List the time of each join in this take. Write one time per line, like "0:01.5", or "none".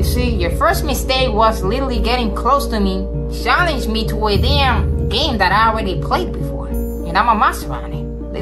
none